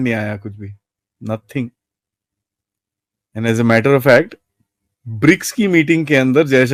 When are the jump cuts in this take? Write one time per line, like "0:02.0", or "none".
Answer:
none